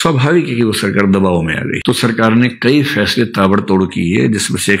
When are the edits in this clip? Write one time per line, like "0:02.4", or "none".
0:01.8